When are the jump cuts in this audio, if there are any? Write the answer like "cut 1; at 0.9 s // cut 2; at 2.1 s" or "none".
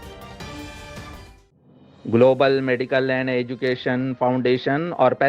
cut 1; at 1.3 s